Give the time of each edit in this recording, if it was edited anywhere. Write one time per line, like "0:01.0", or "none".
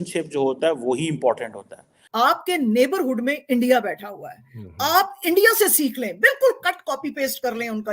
0:02.0

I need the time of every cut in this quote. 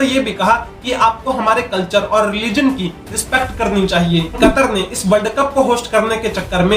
0:04.3

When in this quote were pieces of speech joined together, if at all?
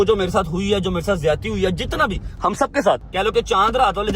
0:03.1

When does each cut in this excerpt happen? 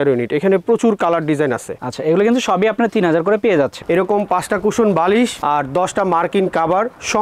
0:03.8

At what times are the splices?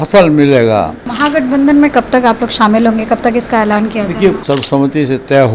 0:01.0
0:04.4

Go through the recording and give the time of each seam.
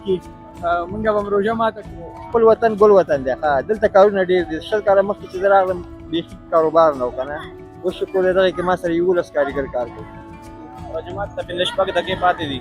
0:02.1
0:10.6

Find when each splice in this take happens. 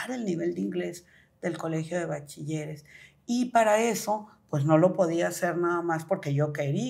none

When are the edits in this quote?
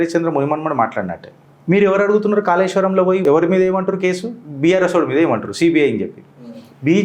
0:03.2

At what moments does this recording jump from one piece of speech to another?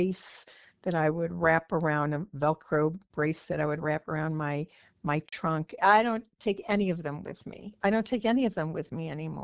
0:05.8

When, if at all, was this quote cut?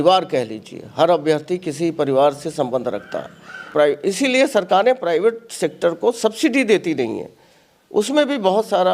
0:03.6

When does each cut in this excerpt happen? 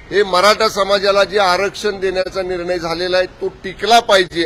none

